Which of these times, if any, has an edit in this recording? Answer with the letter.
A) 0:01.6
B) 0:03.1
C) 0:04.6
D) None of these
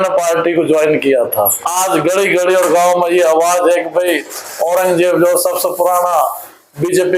A